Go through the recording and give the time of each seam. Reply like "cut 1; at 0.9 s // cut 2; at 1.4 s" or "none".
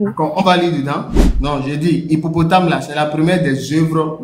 cut 1; at 1.2 s